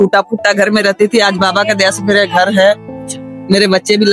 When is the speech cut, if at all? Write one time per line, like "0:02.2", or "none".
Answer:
none

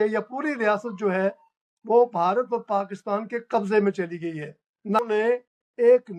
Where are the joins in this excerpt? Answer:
0:05.0

